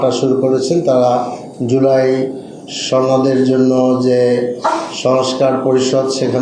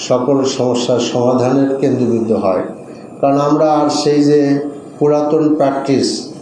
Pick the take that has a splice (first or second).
first